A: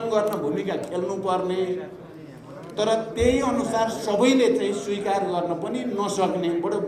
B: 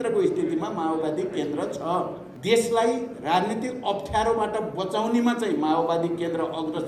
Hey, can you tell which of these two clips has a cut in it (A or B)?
B